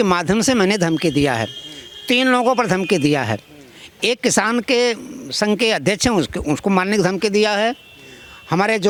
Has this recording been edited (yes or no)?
no